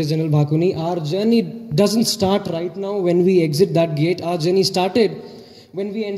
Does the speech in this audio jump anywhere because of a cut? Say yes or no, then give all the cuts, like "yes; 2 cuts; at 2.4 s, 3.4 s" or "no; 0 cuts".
no; 0 cuts